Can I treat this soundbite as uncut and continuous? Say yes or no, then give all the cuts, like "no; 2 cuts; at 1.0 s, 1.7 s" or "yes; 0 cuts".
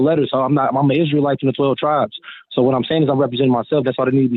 yes; 0 cuts